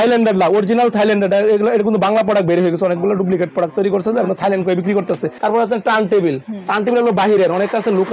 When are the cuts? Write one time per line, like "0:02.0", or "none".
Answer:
0:05.3